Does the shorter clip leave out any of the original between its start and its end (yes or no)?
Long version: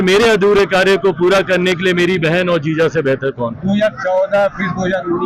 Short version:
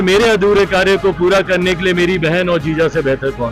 no